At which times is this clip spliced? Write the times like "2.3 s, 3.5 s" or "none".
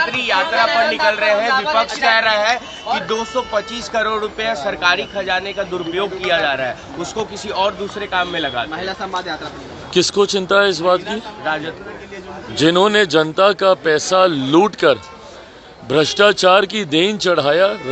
none